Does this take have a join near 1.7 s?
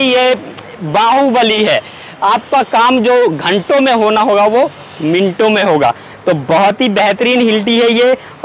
no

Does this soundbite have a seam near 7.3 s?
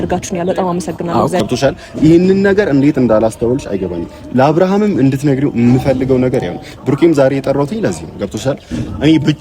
no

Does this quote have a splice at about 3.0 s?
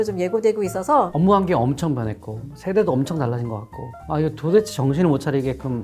no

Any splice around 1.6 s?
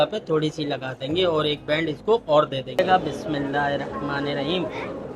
no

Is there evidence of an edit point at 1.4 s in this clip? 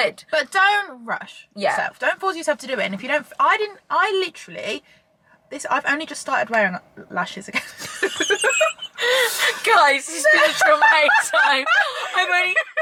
no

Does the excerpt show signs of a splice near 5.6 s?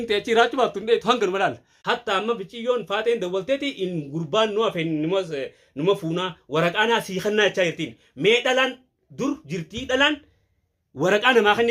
no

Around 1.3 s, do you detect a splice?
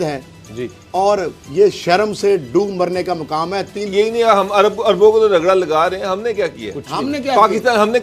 no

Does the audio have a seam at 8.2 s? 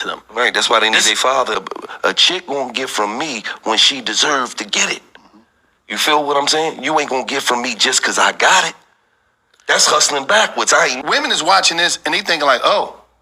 no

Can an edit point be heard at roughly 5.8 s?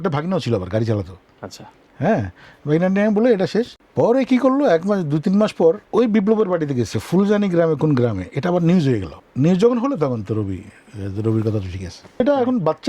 yes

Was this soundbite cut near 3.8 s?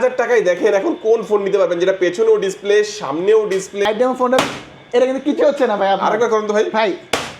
yes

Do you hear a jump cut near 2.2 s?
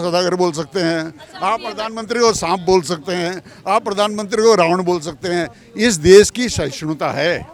no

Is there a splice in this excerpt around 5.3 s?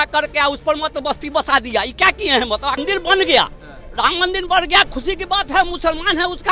no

